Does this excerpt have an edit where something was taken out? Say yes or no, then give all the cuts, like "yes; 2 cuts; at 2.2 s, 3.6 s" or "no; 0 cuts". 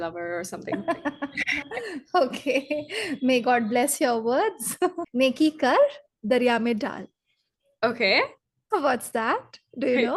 yes; 1 cut; at 5.0 s